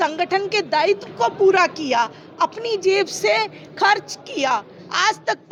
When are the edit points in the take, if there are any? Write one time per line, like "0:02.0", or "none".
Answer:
none